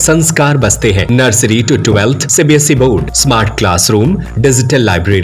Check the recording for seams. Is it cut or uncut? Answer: cut